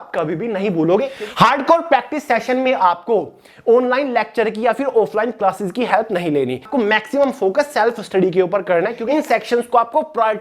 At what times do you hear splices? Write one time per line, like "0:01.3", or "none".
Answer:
0:01.1
0:06.7
0:09.0